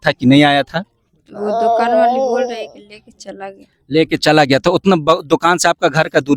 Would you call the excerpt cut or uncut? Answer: uncut